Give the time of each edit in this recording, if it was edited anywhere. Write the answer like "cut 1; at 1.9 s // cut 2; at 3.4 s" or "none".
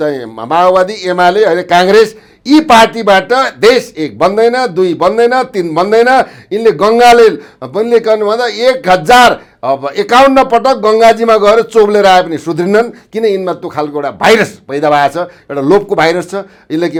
none